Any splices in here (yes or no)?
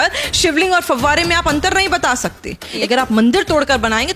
yes